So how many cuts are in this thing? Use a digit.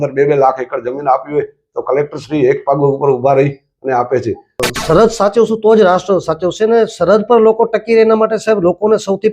1